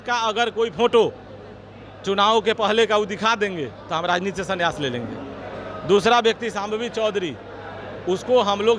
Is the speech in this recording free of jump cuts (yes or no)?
yes